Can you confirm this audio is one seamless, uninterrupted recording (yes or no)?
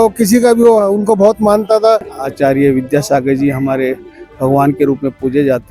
no